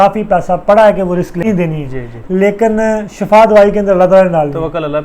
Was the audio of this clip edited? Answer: yes; 1 cut; at 1.4 s

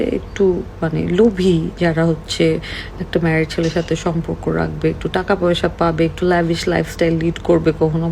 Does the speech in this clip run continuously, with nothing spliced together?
yes; 0 cuts

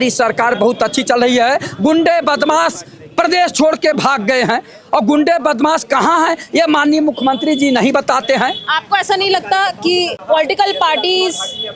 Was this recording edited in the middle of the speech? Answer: no; 0 cuts

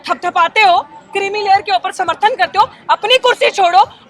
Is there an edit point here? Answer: no; 0 cuts

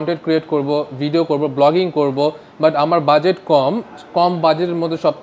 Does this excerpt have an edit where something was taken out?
no; 0 cuts

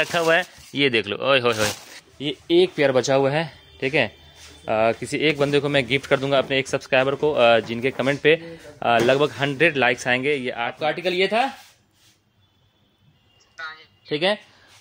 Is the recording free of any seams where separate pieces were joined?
no; 2 cuts; at 1.9 s, 10.6 s

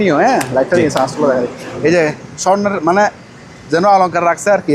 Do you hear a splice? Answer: no; 0 cuts

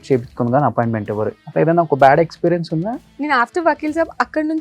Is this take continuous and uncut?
no; 2 cuts; at 1.4 s, 3.1 s

